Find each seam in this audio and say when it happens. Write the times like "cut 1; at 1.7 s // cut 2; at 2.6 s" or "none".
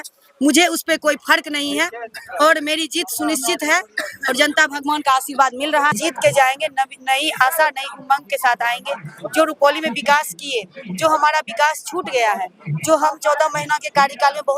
cut 1; at 5.9 s